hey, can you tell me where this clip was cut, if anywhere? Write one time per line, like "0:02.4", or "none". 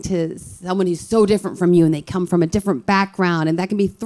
none